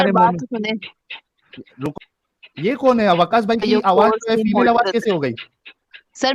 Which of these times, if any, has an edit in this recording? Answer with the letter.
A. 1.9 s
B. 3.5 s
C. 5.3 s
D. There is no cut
A